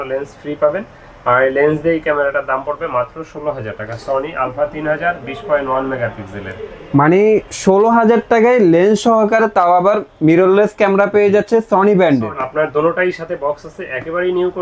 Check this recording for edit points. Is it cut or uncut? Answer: cut